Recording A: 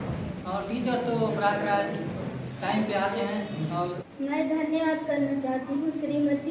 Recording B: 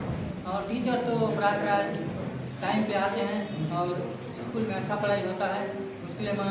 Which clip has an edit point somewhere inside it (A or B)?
A